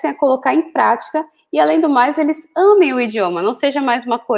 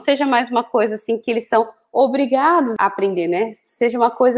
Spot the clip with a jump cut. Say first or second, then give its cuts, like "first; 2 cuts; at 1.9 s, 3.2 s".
second; 1 cut; at 2.7 s